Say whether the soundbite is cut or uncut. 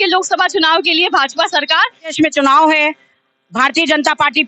cut